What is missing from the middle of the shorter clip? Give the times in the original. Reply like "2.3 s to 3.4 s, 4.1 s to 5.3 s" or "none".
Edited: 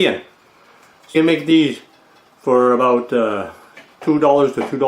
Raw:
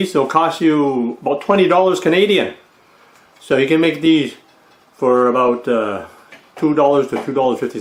3.4 s to 3.7 s